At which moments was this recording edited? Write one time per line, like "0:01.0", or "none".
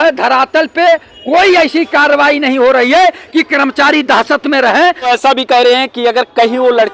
0:05.1